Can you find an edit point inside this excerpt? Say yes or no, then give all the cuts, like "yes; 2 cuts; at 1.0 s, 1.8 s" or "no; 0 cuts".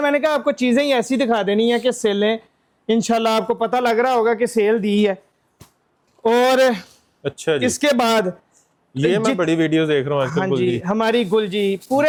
no; 0 cuts